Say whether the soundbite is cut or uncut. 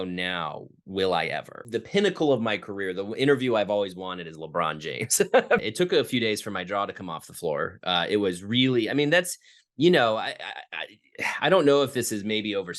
cut